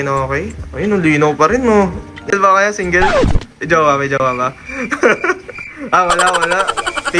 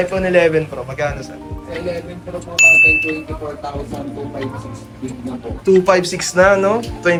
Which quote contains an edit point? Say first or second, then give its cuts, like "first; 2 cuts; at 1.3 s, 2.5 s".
first; 1 cut; at 1.8 s